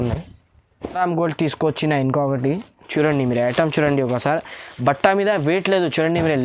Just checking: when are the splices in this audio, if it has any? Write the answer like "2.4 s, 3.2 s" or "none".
1.0 s